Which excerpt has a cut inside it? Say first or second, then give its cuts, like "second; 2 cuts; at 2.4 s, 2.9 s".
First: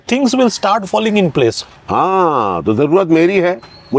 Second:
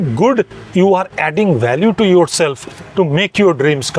first; 1 cut; at 1.7 s